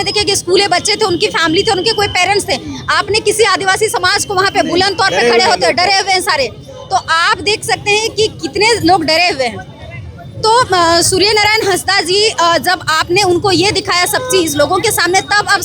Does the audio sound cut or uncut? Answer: uncut